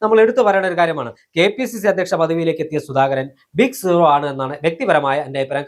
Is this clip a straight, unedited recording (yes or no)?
yes